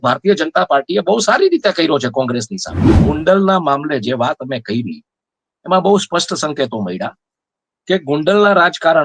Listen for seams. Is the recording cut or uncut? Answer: cut